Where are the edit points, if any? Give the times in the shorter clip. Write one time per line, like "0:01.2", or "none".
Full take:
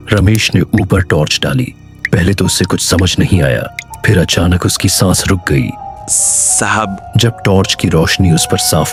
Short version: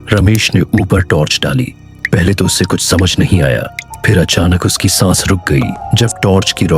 0:05.8